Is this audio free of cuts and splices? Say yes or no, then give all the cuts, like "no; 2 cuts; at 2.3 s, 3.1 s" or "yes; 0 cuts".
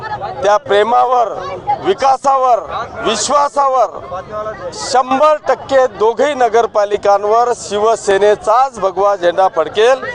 yes; 0 cuts